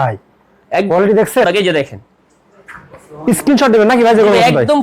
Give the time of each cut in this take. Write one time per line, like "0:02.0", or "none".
0:01.4